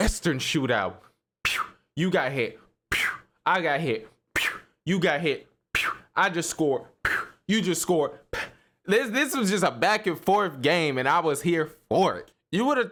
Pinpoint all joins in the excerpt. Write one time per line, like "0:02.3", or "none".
none

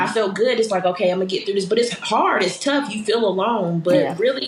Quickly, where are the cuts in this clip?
none

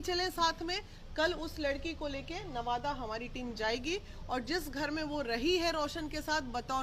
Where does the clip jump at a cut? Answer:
none

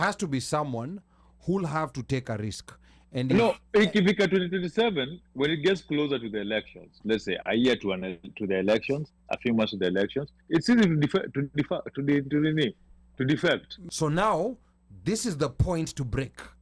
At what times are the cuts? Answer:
0:13.8

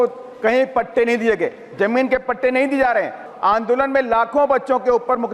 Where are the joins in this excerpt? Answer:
0:03.3

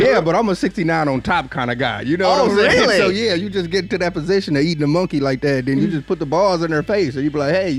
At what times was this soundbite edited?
none

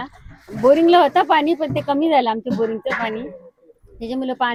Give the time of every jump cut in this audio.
none

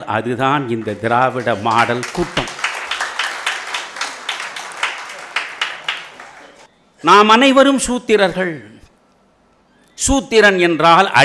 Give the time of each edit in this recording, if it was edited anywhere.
0:06.6

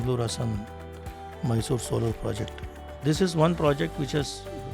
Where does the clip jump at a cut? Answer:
0:03.0

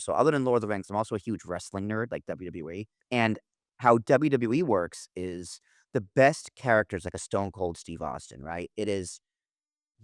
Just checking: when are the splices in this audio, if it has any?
0:03.1

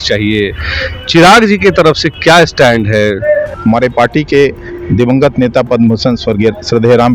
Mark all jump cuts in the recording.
0:03.5

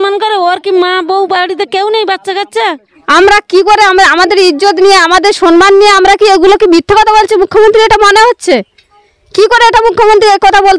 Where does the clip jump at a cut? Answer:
0:03.0

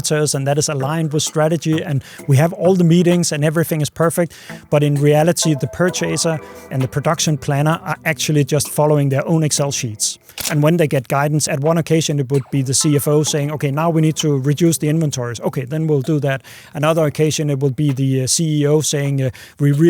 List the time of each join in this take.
0:05.6
0:06.7
0:10.4
0:11.4

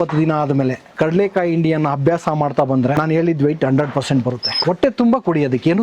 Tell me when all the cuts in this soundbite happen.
0:00.8
0:02.9
0:04.5

